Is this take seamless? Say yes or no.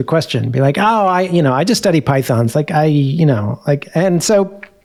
yes